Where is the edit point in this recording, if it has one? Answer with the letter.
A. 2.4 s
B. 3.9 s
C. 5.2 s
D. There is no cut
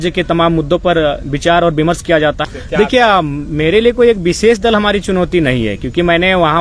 A